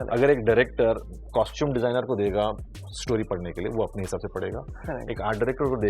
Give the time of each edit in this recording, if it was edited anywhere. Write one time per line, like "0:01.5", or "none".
0:01.3